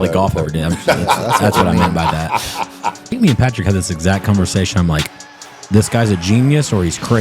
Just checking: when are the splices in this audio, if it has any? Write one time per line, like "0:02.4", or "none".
0:03.2

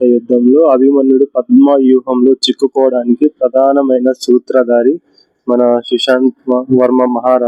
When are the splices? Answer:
none

